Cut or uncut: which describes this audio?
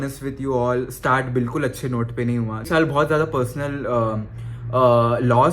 cut